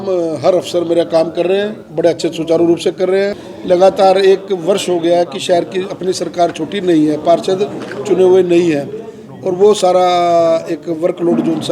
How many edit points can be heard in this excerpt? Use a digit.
1